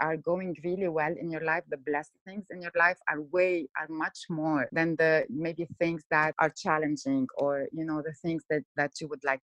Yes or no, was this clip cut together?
yes